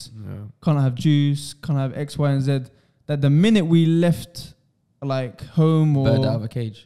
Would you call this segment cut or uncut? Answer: uncut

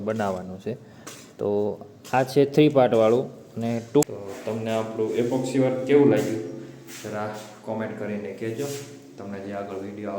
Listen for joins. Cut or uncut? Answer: cut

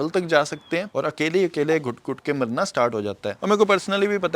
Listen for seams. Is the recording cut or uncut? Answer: cut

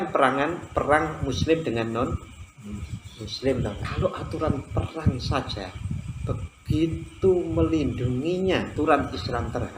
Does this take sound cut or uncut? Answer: cut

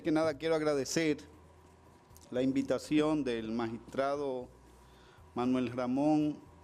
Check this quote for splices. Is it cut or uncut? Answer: uncut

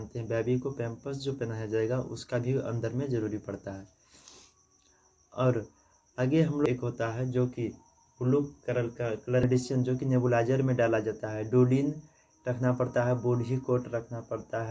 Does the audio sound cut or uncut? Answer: cut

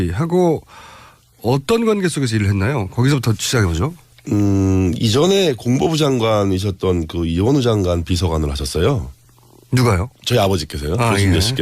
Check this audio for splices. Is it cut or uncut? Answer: cut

